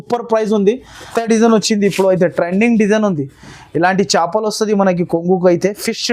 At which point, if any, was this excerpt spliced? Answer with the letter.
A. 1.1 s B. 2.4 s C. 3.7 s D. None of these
A